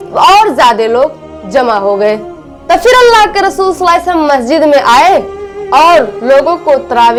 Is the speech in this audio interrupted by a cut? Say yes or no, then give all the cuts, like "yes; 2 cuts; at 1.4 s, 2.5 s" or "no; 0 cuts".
no; 0 cuts